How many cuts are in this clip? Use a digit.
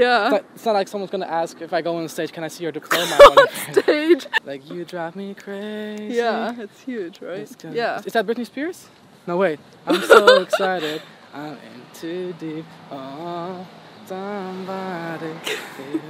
1